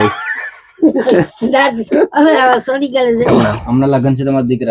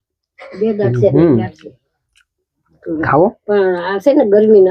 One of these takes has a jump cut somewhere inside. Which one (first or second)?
first